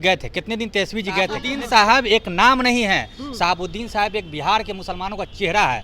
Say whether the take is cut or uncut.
cut